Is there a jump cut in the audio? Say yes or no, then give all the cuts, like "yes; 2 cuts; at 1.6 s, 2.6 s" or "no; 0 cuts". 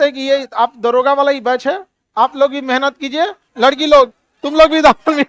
yes; 1 cut; at 3.4 s